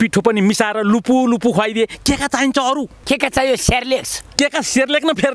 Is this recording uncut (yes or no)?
yes